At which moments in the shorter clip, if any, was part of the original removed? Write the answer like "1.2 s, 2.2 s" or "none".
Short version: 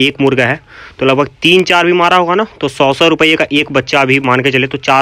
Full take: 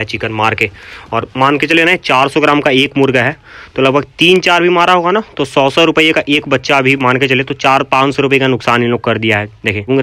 none